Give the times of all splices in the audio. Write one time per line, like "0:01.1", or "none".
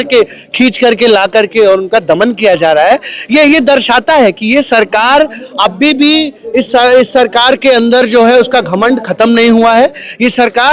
none